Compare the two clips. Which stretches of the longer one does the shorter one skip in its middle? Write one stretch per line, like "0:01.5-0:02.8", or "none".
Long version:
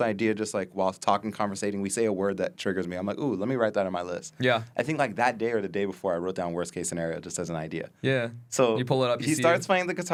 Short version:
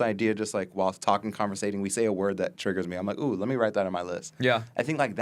none